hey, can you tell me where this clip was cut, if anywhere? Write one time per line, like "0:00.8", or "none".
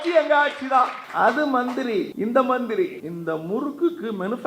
0:01.0
0:02.1
0:03.1